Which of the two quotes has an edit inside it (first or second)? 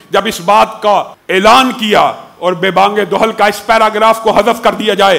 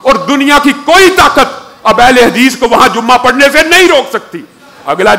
first